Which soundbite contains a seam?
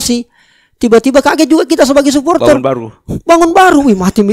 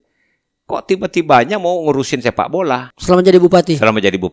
second; 1 cut; at 2.9 s

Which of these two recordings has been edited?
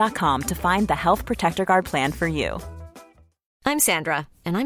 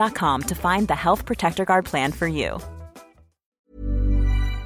second; 1 cut; at 3.6 s

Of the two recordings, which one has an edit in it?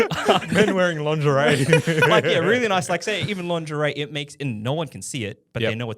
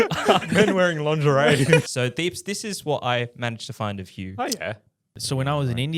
second; 2 cuts; at 1.8 s, 5.2 s

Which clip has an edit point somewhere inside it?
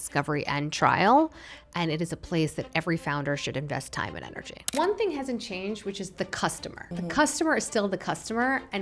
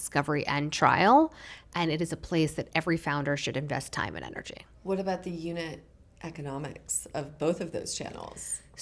first; 2 cuts; at 4.7 s, 6.7 s

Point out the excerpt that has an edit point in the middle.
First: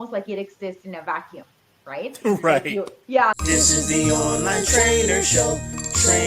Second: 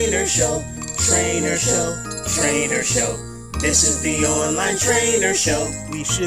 first; 1 cut; at 3.3 s

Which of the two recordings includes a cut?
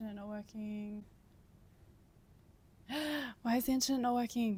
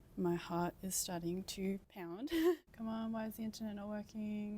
second; 1 cut; at 2.7 s

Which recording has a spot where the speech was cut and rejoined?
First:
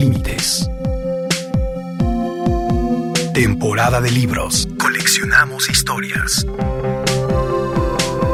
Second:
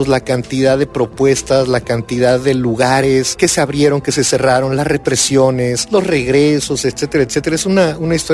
second; 2 cuts; at 3.3 s, 5.8 s

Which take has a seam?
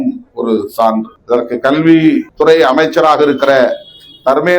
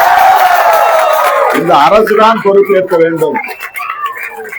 first; 2 cuts; at 1.1 s, 2.3 s

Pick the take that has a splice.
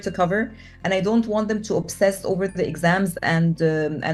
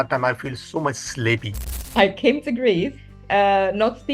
second; 1 cut; at 1.8 s

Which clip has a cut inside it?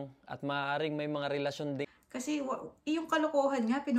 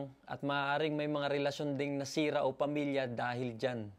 first; 1 cut; at 1.9 s

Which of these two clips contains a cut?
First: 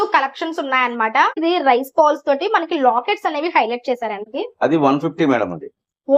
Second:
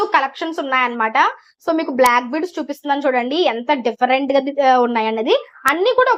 first; 2 cuts; at 1.4 s, 4.2 s

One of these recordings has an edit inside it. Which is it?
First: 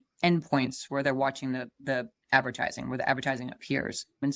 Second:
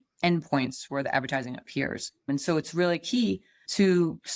second; 1 cut; at 1.0 s

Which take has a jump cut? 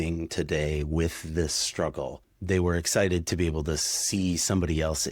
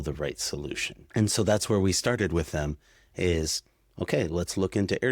second; 1 cut; at 0.9 s

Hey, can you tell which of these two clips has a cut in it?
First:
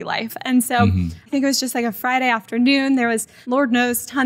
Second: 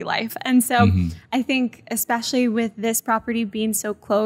first; 2 cuts; at 1.2 s, 3.3 s

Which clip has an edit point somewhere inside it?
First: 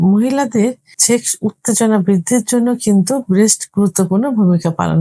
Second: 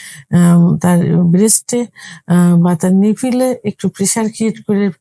first; 1 cut; at 0.9 s

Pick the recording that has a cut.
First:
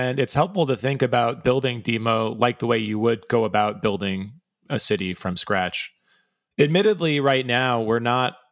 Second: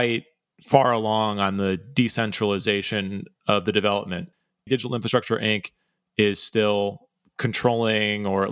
second; 1 cut; at 4.5 s

